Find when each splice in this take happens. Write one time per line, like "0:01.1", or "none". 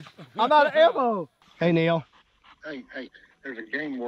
0:01.4